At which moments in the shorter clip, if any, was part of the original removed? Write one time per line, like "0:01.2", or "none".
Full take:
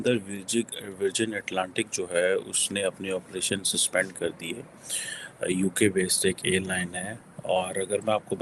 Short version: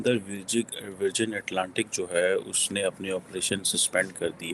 none